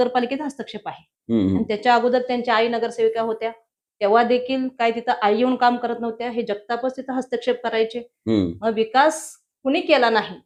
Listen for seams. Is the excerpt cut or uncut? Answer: uncut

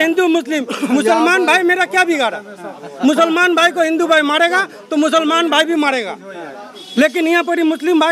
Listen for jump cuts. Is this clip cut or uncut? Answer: uncut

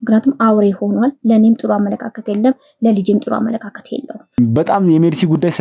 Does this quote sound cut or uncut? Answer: cut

